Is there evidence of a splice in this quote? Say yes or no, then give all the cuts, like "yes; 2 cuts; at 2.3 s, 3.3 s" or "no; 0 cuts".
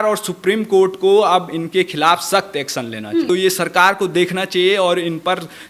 yes; 1 cut; at 3.3 s